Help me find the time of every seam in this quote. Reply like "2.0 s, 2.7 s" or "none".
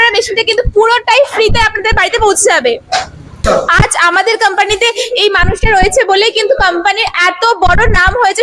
3.6 s

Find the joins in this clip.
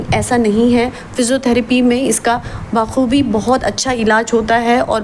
none

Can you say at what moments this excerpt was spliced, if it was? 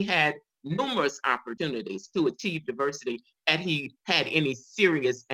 1.5 s

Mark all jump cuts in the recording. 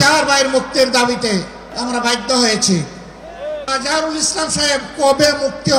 1.7 s, 3.7 s

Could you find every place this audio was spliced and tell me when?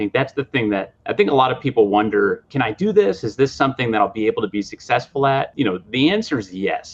1.0 s, 2.5 s, 5.5 s

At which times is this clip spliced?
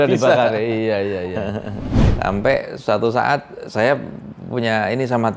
2.0 s

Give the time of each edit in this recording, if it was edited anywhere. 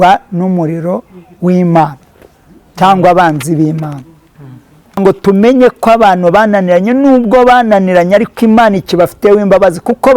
5.0 s

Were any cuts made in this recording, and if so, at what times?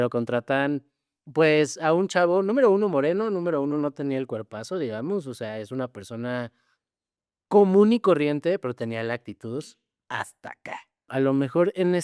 11.1 s

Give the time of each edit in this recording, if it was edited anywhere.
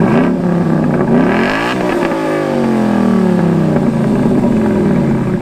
none

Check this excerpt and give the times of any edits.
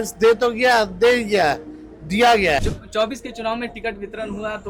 2.6 s

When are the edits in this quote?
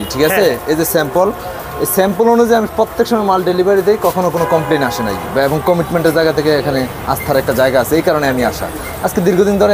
none

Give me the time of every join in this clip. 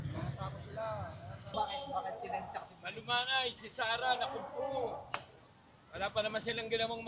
1.5 s

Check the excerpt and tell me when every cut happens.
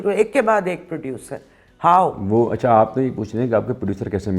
none

